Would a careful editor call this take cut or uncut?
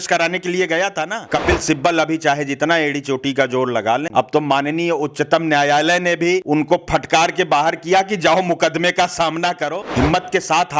cut